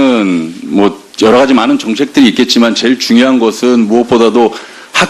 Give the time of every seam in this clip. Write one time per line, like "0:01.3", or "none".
0:02.5